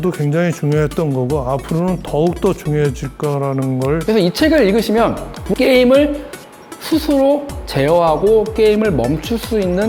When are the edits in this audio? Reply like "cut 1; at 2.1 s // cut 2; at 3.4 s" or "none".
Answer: cut 1; at 4.0 s // cut 2; at 5.5 s